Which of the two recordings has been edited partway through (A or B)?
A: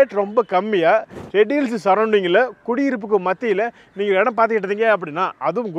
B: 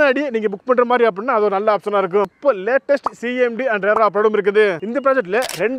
B